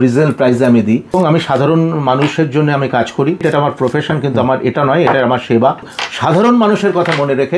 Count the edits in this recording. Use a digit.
3